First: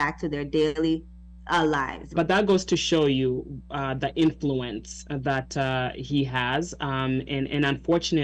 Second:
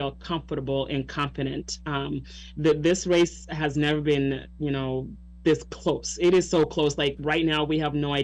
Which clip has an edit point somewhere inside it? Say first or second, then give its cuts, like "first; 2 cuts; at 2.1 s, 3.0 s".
first; 1 cut; at 2.0 s